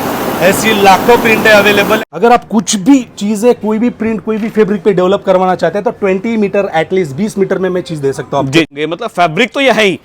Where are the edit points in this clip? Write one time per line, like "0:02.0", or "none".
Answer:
0:02.0
0:08.7